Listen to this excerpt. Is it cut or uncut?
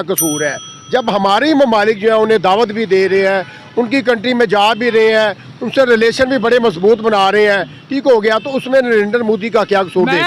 uncut